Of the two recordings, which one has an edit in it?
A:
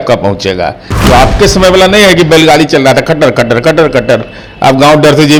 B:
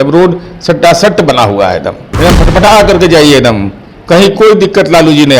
B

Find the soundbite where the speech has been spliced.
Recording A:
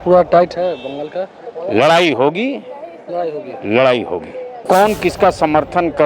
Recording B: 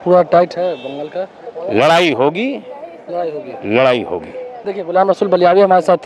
A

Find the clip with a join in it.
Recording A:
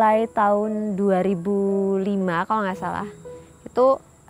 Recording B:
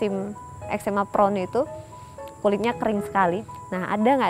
B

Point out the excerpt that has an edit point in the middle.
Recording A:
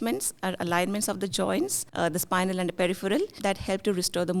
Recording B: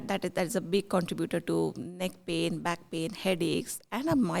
A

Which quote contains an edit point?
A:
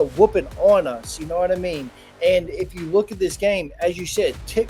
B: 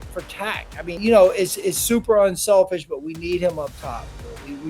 B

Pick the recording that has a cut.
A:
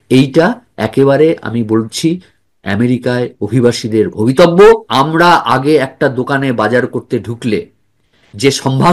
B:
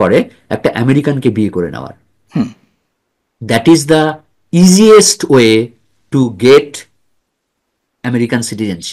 A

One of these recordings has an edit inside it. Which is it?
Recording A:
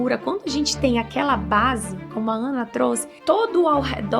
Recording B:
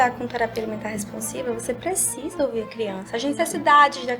A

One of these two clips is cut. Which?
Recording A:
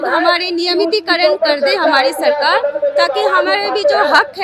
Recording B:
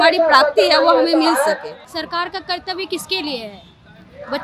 B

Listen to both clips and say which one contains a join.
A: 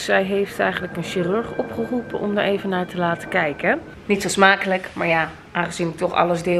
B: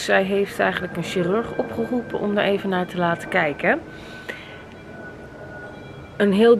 A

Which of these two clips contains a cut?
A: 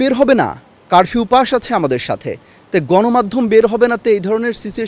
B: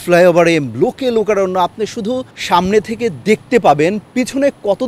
B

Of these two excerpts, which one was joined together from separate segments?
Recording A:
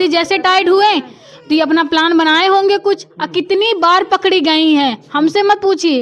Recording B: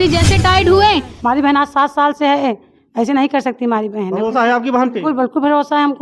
B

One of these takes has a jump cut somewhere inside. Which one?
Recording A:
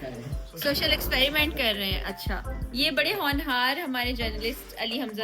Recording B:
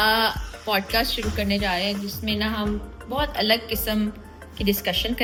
A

